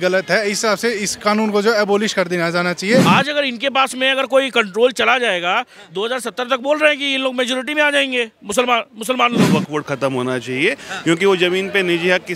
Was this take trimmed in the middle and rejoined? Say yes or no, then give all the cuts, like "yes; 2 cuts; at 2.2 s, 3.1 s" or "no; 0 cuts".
yes; 2 cuts; at 3.0 s, 9.5 s